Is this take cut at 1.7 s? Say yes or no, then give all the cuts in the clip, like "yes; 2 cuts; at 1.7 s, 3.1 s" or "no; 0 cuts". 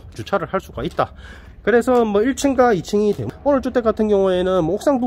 no; 1 cut; at 3.2 s